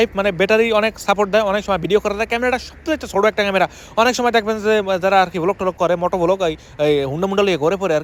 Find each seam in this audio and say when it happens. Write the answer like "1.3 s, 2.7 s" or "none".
none